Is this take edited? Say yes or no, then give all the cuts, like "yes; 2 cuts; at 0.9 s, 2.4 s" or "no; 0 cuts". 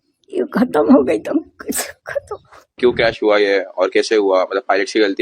yes; 1 cut; at 2.8 s